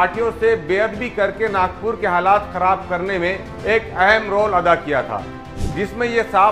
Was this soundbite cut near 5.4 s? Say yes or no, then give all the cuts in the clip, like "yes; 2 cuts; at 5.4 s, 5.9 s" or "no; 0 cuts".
yes; 1 cut; at 5.4 s